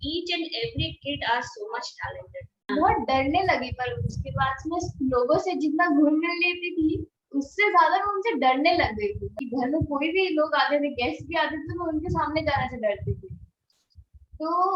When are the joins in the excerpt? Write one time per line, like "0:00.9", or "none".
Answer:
0:02.6
0:09.4